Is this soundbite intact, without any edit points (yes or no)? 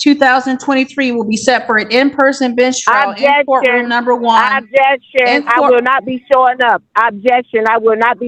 yes